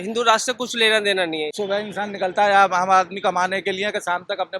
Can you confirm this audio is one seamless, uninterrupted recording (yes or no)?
no